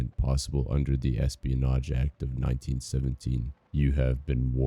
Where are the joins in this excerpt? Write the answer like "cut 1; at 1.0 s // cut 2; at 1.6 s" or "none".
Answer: cut 1; at 3.6 s